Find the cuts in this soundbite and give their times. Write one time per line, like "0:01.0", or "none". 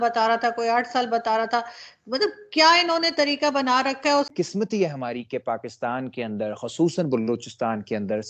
0:04.3